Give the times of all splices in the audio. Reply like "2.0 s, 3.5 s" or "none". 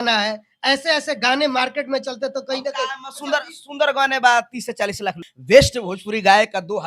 5.3 s